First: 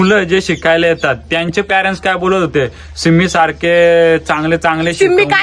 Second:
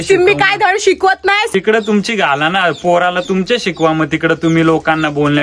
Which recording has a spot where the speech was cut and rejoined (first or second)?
second